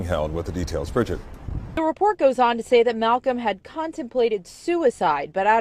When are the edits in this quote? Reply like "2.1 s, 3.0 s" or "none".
1.5 s